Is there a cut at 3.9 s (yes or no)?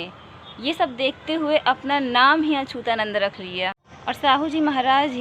yes